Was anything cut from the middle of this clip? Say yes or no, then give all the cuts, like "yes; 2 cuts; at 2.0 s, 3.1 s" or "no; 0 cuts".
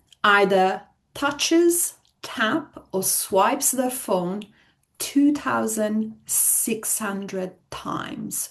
no; 0 cuts